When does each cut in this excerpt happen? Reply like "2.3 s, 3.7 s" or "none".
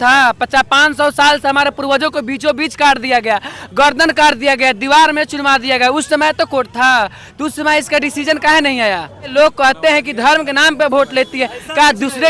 9.3 s

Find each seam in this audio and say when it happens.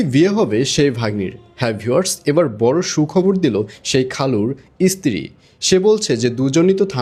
none

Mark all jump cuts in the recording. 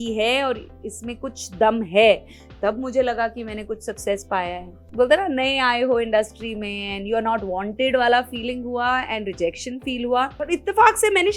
4.8 s, 10.4 s

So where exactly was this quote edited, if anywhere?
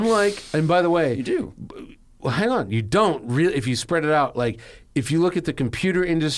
none

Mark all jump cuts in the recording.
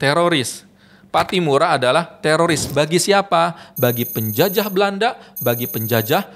none

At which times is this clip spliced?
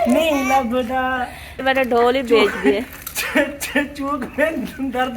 1.6 s

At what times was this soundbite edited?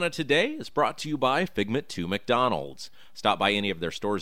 none

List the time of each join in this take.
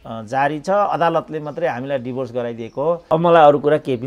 3.0 s

